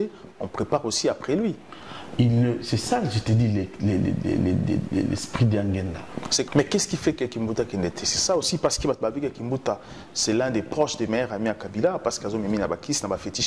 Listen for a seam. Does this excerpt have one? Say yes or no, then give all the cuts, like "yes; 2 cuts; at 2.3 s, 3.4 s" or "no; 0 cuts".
yes; 1 cut; at 6.5 s